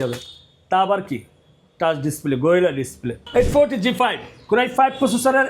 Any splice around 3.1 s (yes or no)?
yes